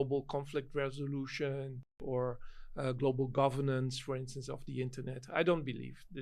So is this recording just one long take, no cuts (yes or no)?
no